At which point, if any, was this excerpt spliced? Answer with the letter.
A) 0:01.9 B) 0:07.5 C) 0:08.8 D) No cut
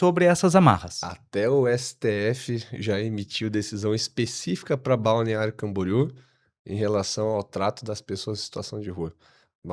D